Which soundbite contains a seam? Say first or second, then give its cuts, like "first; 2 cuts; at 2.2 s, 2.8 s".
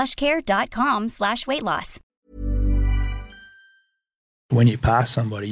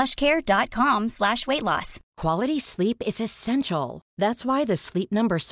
first; 2 cuts; at 2.1 s, 4.4 s